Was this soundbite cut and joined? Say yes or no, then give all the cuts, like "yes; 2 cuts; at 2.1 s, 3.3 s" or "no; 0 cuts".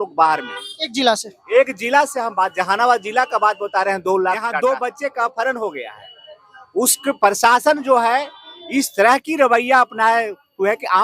yes; 1 cut; at 4.5 s